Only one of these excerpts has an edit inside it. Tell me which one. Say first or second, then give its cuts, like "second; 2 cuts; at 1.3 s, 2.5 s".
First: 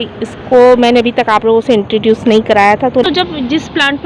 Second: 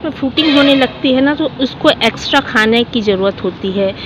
first; 1 cut; at 3.0 s